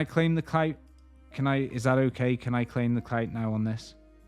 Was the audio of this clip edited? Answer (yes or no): no